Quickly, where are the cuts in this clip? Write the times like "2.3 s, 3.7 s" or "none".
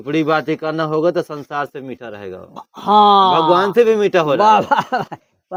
none